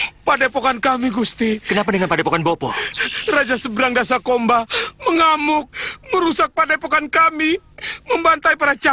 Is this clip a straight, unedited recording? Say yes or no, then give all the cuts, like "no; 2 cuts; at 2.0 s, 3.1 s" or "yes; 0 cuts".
yes; 0 cuts